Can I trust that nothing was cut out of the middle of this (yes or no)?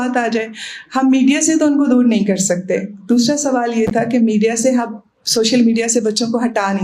yes